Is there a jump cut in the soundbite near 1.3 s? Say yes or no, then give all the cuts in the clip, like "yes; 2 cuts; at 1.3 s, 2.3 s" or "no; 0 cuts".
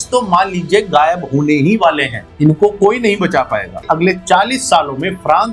no; 1 cut; at 3.8 s